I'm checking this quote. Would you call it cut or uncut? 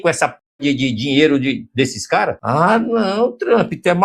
cut